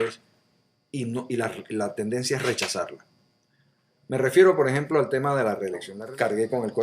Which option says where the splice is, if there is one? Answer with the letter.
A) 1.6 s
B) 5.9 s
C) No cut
B